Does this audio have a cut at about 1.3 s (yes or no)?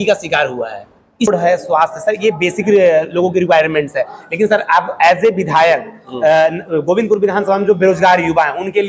yes